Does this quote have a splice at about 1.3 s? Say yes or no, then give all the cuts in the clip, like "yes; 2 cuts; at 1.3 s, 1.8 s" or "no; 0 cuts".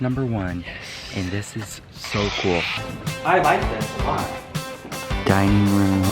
no; 1 cut; at 5.2 s